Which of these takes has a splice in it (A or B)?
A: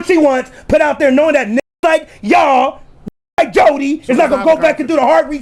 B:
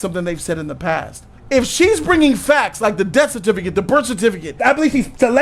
B